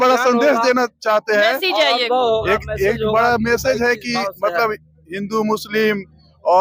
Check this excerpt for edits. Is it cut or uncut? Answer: uncut